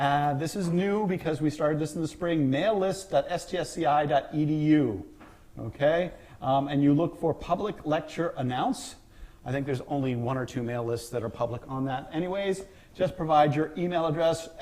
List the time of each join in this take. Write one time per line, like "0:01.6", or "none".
0:02.8